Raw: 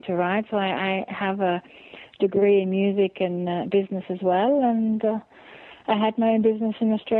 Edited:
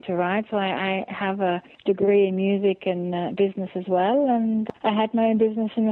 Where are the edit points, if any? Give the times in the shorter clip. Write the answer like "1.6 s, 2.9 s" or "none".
1.7 s, 4.6 s